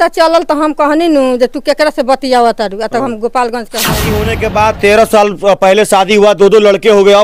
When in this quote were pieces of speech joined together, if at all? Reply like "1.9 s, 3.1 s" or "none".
4.2 s

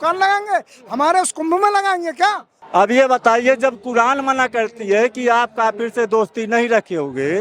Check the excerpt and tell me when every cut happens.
2.5 s

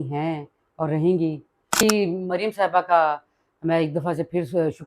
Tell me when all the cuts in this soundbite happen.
1.8 s

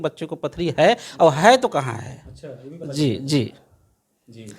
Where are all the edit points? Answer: none

